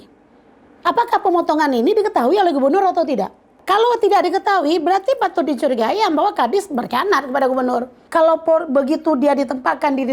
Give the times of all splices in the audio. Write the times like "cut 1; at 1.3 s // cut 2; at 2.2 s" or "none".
cut 1; at 3.6 s // cut 2; at 8.0 s